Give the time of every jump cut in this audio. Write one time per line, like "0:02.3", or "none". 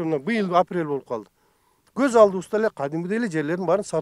none

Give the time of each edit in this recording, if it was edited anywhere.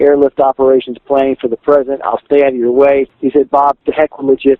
0:03.6

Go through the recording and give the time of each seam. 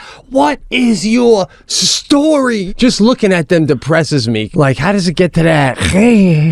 0:02.6
0:04.5

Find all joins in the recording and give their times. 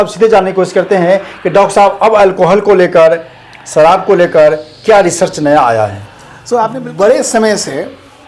0:06.8

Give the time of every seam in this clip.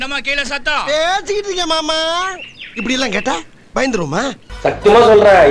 0:04.4

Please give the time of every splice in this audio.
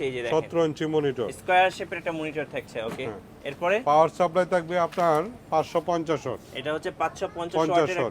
none

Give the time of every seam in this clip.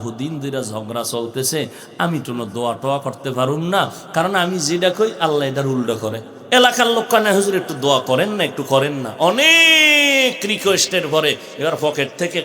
0:06.3

